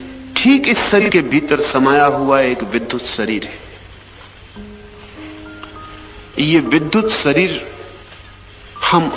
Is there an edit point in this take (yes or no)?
yes